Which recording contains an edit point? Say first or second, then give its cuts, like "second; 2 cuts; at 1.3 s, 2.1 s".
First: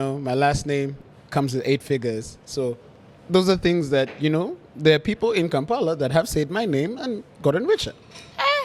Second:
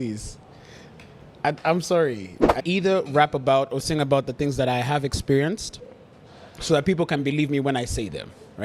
second; 1 cut; at 2.6 s